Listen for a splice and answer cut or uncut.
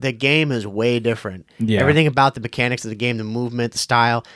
uncut